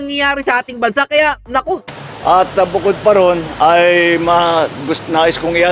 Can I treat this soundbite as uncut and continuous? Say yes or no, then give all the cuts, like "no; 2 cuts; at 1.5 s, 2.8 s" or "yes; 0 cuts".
yes; 0 cuts